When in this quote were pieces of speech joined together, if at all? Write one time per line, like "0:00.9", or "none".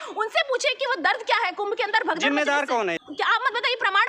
0:03.0